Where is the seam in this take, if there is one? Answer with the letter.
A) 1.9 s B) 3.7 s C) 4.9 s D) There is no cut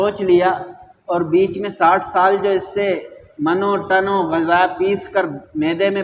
D